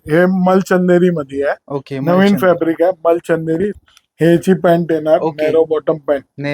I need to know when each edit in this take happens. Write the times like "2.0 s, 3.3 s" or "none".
3.8 s